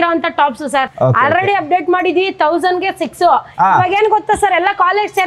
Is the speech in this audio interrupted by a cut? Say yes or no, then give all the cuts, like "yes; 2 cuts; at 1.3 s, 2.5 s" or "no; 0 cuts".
no; 0 cuts